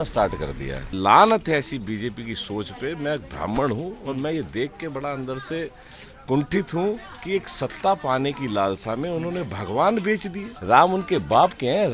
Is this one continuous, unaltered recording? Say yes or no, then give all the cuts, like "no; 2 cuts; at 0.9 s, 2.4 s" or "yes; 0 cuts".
no; 2 cuts; at 0.9 s, 10.5 s